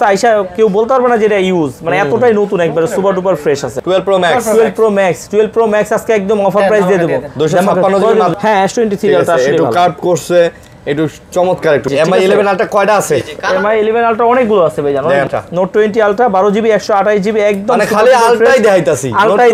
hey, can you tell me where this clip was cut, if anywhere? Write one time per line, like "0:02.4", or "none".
0:03.8
0:08.3
0:11.9
0:15.3